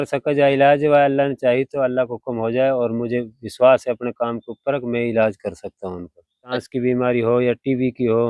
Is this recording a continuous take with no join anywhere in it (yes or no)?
no